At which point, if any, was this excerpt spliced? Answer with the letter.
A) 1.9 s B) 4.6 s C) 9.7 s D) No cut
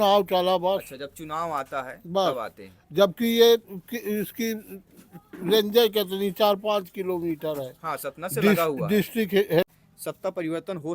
C